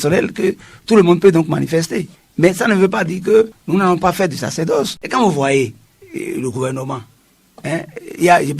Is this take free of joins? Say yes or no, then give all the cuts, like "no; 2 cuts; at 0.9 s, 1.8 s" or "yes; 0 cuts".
no; 1 cut; at 5.0 s